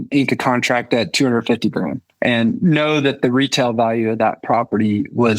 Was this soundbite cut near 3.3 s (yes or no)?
no